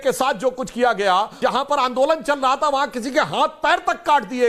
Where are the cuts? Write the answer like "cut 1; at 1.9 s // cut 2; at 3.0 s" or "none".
cut 1; at 1.4 s